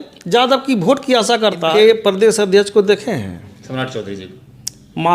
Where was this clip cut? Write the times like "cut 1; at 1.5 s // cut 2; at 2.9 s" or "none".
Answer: cut 1; at 1.7 s